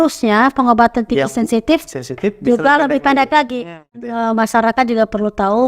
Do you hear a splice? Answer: yes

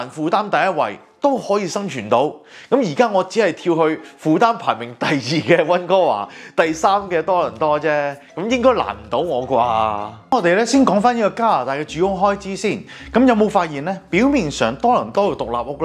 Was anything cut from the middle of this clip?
no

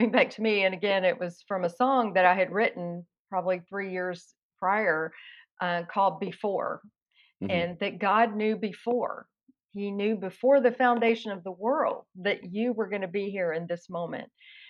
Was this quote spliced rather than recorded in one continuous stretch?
yes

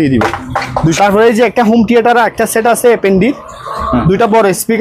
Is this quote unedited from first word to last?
no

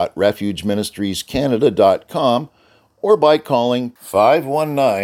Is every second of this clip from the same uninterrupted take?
yes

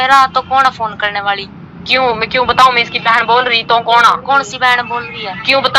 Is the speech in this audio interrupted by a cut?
no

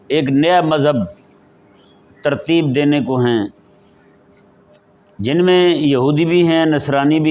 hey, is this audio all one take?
yes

